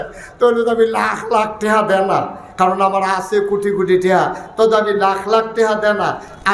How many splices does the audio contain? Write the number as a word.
zero